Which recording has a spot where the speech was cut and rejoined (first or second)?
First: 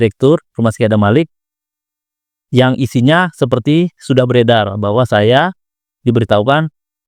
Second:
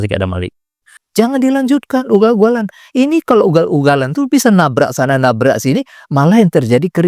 second